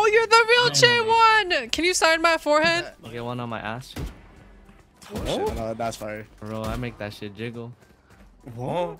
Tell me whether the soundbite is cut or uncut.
uncut